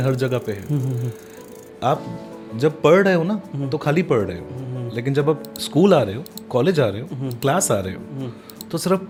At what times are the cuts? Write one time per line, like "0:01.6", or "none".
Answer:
none